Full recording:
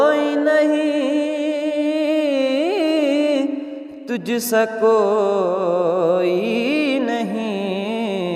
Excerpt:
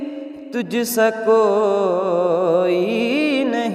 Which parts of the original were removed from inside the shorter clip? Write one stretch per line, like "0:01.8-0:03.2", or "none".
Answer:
none